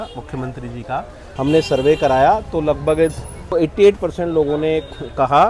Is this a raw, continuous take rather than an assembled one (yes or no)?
no